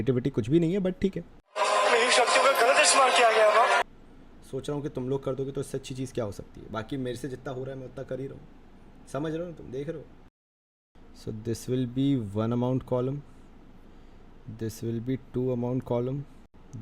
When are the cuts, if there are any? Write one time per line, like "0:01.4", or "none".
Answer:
none